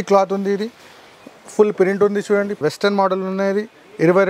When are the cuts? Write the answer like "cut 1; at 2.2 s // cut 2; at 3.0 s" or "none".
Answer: cut 1; at 2.6 s